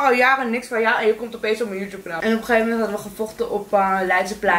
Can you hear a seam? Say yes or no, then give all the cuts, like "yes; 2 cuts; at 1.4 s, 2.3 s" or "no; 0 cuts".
yes; 1 cut; at 2.1 s